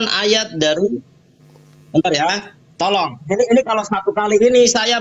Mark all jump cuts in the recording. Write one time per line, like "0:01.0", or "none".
none